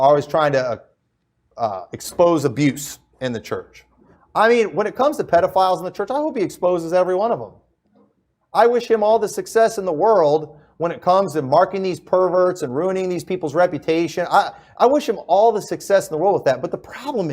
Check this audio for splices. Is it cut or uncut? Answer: cut